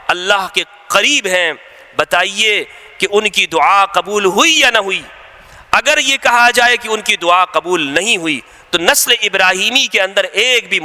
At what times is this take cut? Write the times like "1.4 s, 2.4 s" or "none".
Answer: none